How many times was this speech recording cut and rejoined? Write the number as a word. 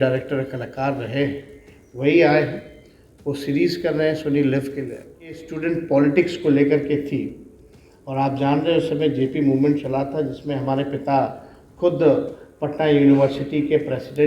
one